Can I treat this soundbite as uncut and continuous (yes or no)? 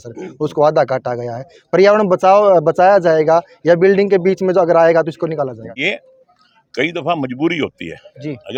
yes